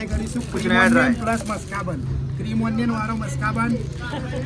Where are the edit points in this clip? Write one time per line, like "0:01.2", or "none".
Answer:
none